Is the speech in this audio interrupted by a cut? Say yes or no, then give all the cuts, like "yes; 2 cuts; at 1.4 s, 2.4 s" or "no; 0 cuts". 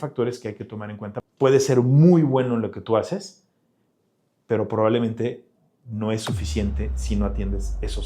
yes; 1 cut; at 1.1 s